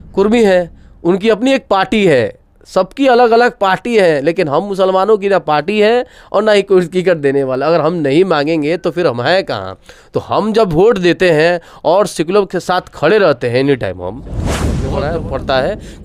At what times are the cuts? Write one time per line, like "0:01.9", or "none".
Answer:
0:14.7